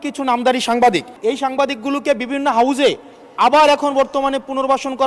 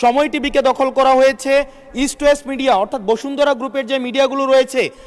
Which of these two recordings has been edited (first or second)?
first